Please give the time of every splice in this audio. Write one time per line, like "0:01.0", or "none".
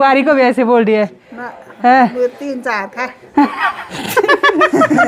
none